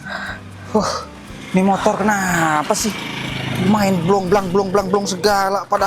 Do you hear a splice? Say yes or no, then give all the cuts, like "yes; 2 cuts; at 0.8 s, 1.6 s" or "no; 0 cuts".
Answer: no; 0 cuts